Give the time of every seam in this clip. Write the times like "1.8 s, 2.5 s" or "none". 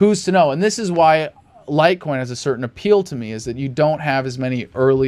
none